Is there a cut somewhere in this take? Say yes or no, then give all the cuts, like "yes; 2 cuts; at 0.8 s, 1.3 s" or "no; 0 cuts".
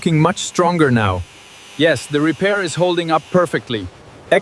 no; 0 cuts